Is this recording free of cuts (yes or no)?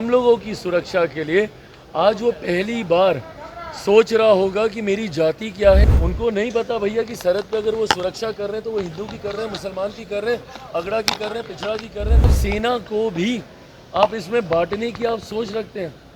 no